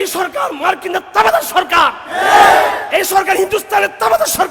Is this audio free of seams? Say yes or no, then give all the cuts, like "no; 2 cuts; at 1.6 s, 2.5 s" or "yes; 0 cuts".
yes; 0 cuts